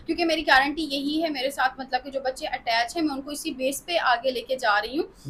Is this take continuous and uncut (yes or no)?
yes